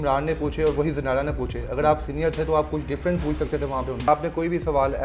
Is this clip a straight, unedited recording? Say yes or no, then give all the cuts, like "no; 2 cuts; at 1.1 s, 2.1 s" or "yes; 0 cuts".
no; 1 cut; at 4.1 s